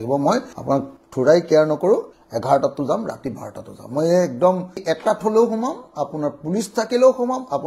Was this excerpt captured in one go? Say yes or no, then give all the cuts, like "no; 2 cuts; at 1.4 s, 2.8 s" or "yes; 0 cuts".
no; 2 cuts; at 2.2 s, 4.7 s